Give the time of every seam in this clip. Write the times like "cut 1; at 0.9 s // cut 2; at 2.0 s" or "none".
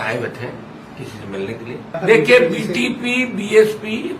cut 1; at 1.9 s